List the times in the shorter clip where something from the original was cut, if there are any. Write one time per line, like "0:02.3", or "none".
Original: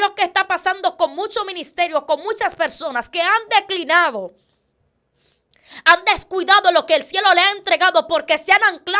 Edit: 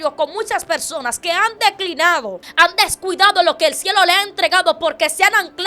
0:02.4